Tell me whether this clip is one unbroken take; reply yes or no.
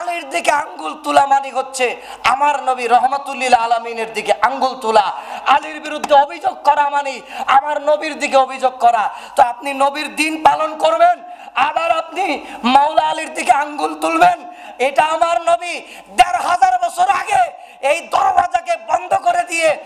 yes